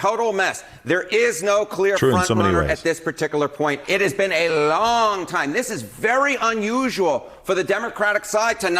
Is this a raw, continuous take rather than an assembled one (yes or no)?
yes